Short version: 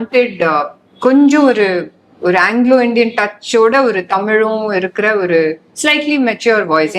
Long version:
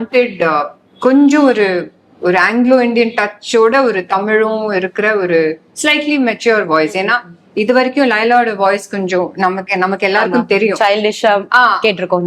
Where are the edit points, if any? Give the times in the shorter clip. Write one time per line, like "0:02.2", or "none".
none

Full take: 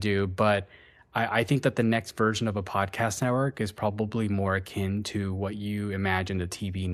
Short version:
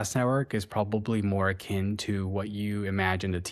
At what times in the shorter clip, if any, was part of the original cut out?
none

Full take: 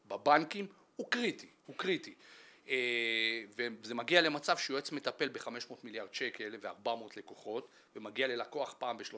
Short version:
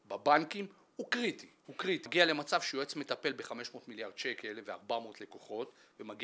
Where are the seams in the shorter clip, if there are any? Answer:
0:02.1

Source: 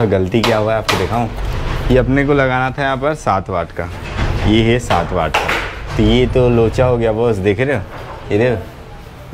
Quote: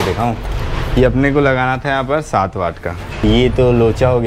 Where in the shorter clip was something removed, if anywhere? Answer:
0:03.1

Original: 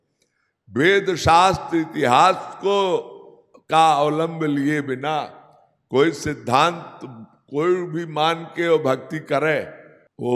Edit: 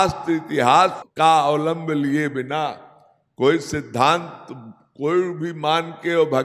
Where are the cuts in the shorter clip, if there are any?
0:01.0

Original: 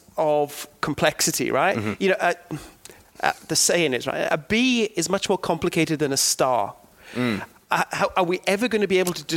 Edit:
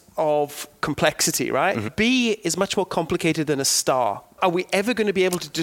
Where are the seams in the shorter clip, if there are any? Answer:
0:01.9
0:04.4

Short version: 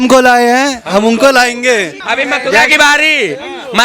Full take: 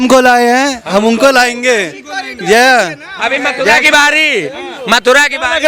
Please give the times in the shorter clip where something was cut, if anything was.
0:02.0

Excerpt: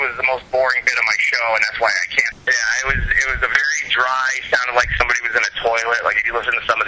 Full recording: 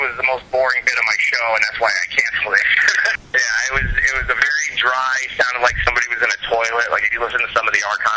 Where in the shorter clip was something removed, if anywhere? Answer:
0:02.3

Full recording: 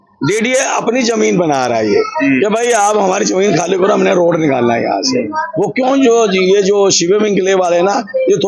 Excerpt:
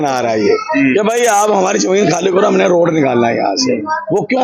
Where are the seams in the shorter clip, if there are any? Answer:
none

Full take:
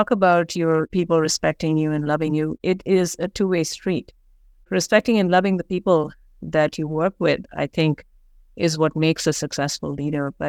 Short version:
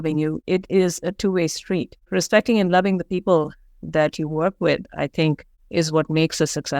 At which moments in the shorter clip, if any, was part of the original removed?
0:02.0
0:05.5

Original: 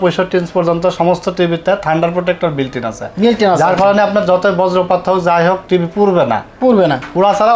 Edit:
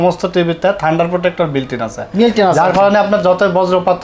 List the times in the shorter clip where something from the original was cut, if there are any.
none

